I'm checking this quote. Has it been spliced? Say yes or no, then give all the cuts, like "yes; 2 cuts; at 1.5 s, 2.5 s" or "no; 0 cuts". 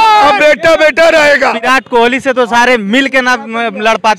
yes; 1 cut; at 1.6 s